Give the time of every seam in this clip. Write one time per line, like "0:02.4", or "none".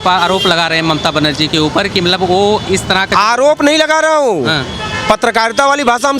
none